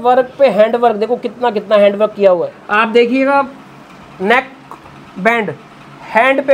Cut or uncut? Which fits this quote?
cut